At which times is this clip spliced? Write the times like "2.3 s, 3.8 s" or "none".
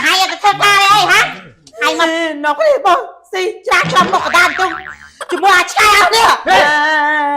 2.0 s